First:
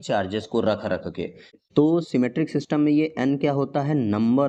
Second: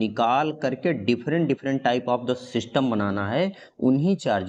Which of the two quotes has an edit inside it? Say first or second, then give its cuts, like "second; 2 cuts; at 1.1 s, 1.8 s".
first; 1 cut; at 1.4 s